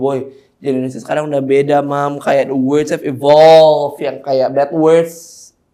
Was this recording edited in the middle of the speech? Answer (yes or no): no